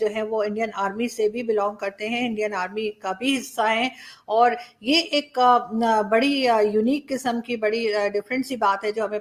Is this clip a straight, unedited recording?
yes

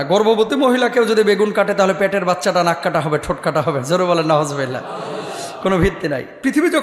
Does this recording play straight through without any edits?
yes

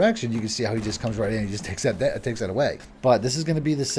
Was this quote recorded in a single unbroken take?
no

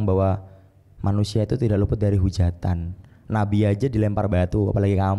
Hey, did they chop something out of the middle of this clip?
no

